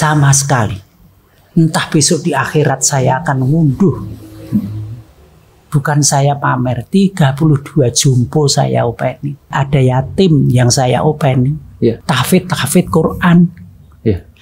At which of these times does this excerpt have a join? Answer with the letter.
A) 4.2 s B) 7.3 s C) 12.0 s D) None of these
C